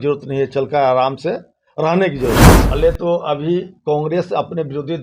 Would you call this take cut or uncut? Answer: cut